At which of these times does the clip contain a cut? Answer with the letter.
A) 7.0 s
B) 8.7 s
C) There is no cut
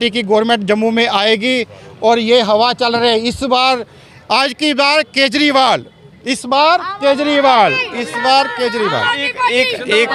C